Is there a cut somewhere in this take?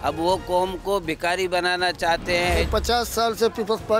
yes; 1 cut; at 2.6 s

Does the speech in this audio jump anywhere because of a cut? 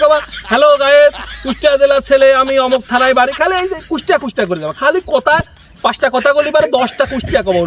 no; 0 cuts

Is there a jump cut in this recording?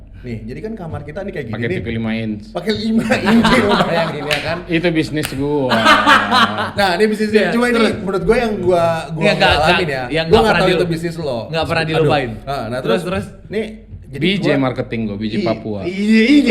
no; 0 cuts

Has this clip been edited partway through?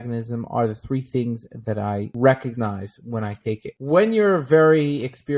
yes; 1 cut; at 3.7 s

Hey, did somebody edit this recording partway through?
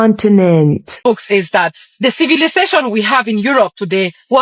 yes; 1 cut; at 1.0 s

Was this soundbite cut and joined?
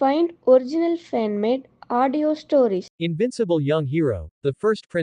yes; 1 cut; at 2.9 s

